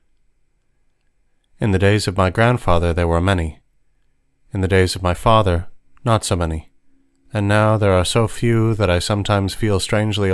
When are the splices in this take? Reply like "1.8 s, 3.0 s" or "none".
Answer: none